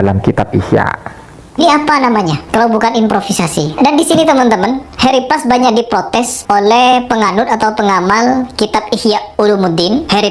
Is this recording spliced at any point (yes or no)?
yes